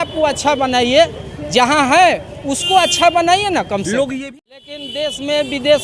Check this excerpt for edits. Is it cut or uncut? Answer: cut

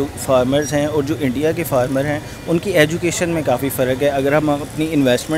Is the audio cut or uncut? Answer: uncut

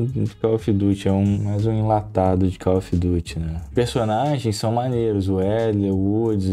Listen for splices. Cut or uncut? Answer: cut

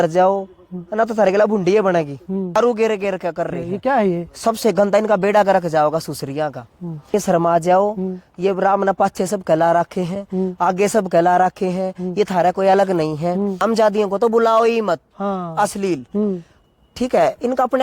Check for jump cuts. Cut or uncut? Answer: cut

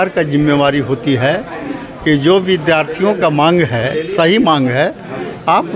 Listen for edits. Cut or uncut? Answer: uncut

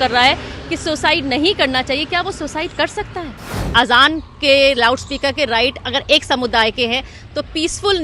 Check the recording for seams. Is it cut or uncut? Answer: cut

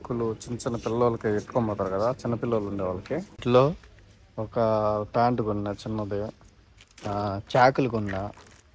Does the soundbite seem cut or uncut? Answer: cut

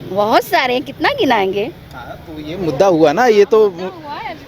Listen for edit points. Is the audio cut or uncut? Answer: uncut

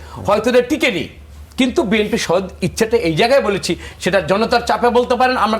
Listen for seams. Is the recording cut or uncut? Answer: uncut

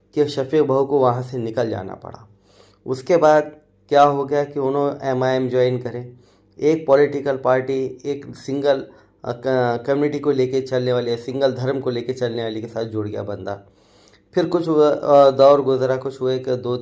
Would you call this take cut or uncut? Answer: uncut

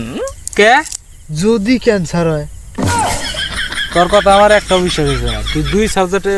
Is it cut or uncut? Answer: uncut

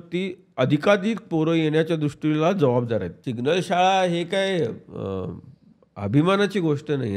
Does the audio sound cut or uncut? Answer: cut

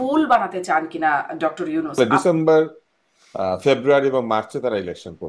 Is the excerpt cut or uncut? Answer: cut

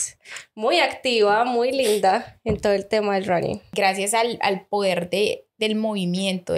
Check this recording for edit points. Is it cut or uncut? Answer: cut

